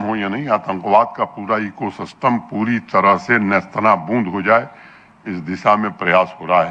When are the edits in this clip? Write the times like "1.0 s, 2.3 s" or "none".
none